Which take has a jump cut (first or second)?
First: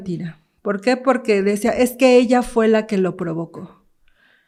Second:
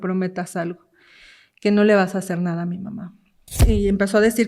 second